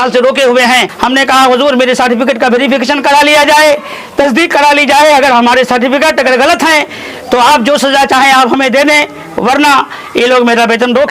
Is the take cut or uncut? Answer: cut